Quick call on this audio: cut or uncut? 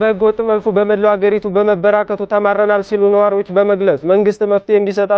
uncut